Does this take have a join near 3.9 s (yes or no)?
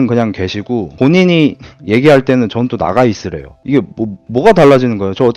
no